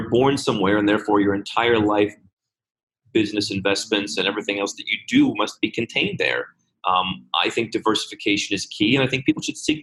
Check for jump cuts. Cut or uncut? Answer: uncut